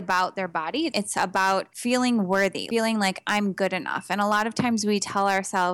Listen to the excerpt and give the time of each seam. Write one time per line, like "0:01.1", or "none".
0:00.9
0:02.6